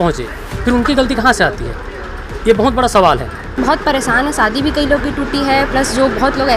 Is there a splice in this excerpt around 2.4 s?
no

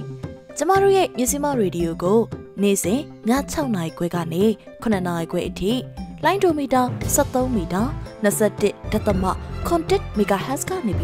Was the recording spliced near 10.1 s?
no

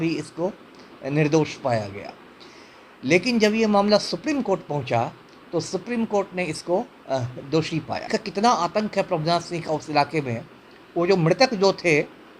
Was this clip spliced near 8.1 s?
yes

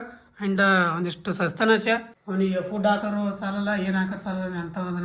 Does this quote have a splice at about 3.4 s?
no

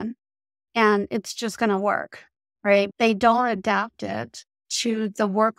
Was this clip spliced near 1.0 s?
no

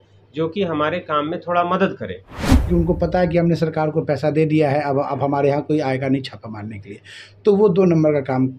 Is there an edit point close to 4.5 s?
no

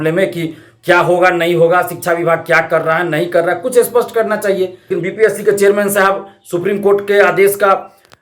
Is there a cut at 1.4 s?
no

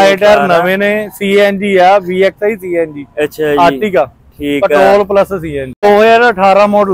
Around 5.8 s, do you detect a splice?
yes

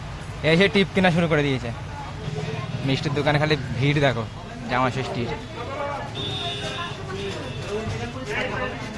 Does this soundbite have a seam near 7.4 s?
no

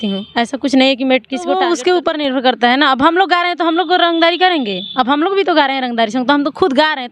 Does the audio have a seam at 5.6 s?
no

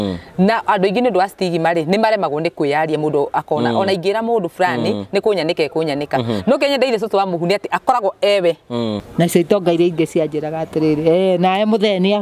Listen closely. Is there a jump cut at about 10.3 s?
no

